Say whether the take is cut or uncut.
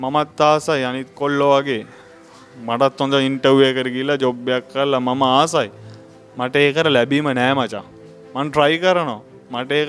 uncut